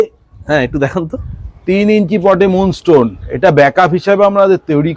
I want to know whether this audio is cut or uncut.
uncut